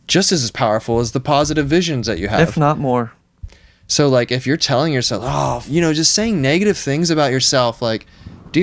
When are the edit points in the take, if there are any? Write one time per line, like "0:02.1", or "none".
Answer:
0:05.6